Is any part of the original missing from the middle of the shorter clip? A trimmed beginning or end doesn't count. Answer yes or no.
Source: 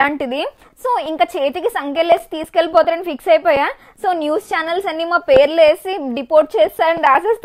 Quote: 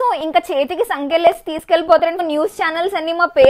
yes